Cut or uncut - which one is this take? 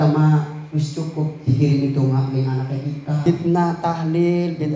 cut